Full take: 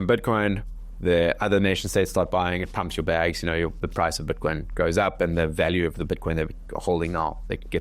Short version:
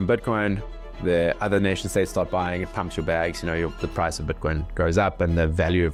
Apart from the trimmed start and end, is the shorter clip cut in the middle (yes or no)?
no